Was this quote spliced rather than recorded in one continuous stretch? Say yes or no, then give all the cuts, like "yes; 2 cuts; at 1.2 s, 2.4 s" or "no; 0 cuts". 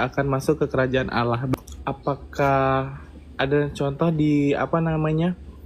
yes; 1 cut; at 1.5 s